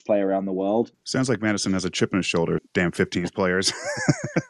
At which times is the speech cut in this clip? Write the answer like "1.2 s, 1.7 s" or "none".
1.0 s, 2.7 s

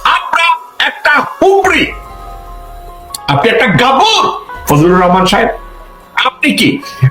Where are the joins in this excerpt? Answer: 4.5 s

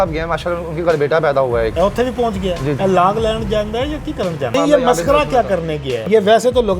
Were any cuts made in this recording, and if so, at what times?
1.7 s, 2.8 s, 4.5 s, 6.1 s

